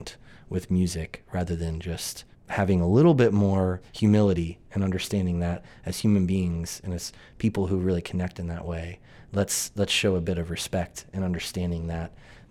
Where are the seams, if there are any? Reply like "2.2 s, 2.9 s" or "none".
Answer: 2.3 s, 3.9 s